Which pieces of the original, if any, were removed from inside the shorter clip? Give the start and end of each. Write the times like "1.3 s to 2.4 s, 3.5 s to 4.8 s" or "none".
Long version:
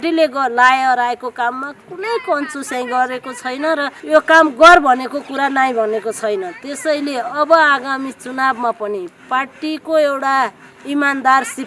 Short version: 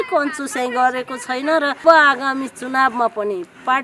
4.0 s to 7.5 s